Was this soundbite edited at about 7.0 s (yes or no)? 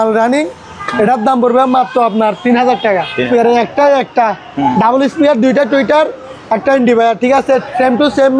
no